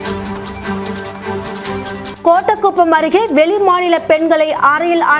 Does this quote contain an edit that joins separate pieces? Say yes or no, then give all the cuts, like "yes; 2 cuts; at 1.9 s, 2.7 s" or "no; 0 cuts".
no; 0 cuts